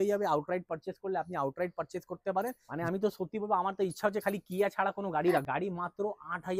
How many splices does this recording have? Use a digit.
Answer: 2